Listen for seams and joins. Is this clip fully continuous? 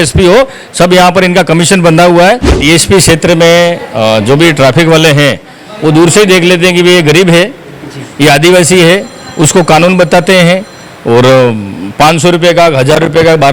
no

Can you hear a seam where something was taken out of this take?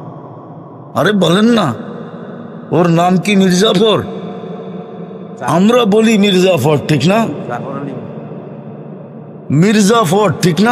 no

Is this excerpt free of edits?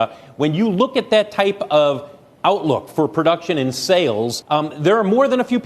no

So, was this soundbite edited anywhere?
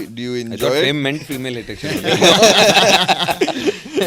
no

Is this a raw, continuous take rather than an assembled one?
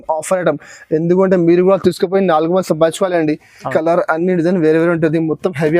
no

